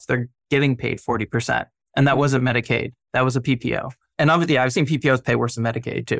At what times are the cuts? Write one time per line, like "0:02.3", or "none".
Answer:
none